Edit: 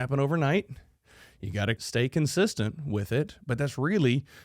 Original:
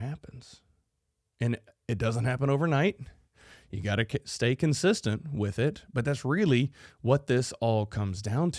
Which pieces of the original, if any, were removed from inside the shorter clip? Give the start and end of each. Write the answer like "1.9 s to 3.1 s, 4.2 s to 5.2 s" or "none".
4.1 s to 4.2 s